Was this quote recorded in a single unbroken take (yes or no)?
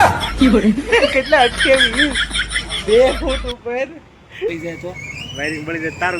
no